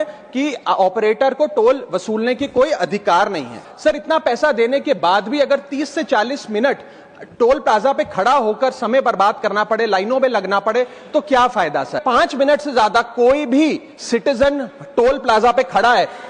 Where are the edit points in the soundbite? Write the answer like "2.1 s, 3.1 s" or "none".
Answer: 3.7 s, 12.0 s